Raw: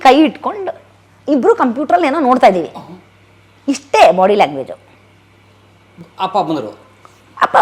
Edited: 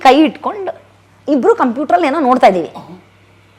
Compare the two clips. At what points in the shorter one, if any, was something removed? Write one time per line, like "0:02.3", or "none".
none

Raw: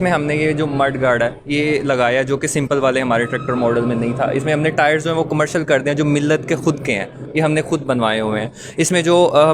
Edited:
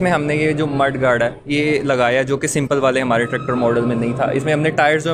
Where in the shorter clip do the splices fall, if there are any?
none

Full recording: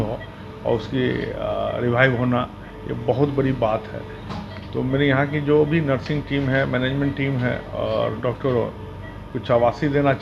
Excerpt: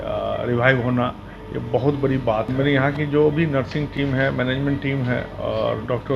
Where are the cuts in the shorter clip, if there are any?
0:02.5

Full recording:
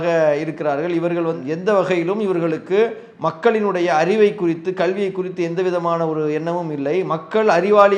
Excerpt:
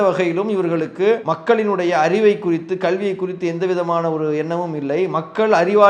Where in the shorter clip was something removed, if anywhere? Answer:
0:01.3

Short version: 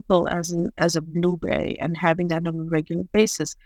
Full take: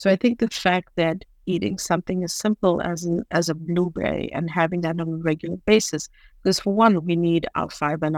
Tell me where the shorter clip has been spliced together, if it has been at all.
none

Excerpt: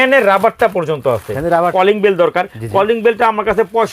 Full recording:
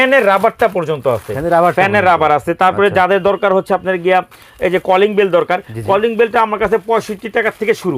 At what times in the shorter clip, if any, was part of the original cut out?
0:01.7

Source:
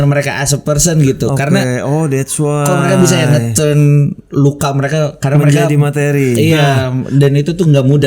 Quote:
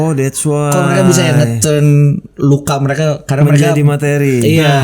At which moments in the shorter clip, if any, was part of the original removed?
none

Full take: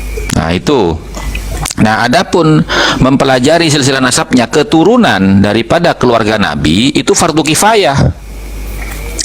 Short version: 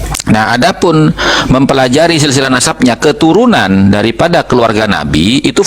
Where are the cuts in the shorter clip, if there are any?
none

